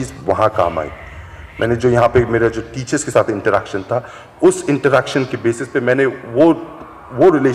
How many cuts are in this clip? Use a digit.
0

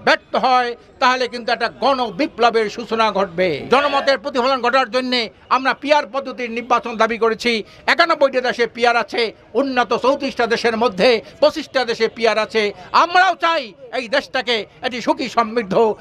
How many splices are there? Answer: 1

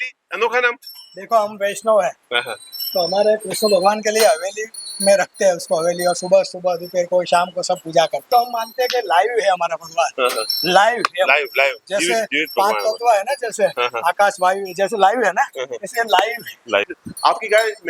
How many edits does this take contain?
2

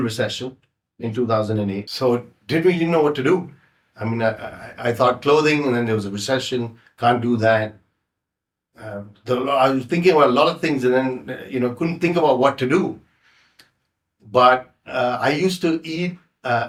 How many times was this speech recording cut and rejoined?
0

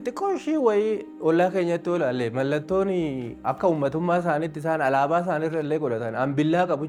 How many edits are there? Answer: 0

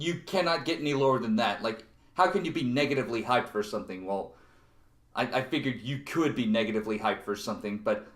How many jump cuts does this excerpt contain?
1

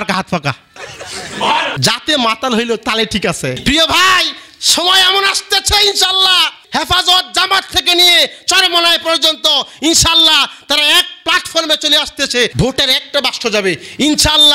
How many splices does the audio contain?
2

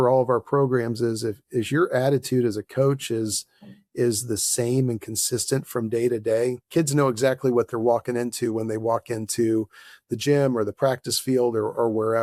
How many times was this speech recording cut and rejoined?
0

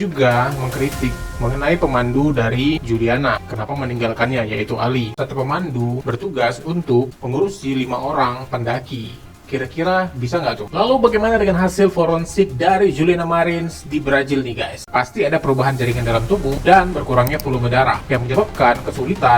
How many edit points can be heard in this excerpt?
3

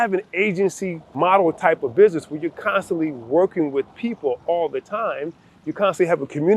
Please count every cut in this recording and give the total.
1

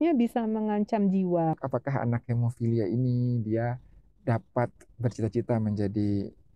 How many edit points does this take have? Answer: 1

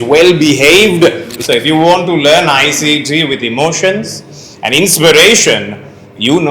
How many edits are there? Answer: 1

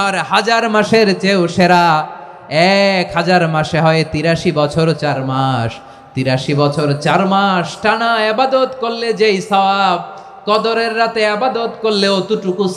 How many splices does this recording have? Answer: 0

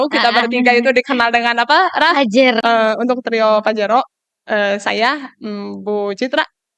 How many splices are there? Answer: 1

